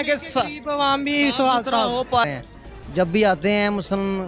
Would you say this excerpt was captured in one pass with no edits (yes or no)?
no